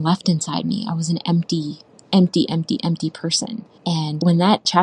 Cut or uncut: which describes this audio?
cut